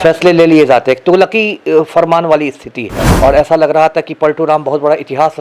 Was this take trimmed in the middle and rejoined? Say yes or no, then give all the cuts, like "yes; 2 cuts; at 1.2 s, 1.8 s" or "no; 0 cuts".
yes; 1 cut; at 3.0 s